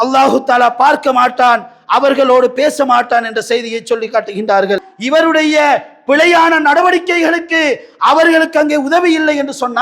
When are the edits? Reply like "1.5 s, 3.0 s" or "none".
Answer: 4.9 s